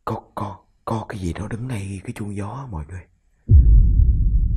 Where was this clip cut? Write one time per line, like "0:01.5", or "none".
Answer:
0:03.4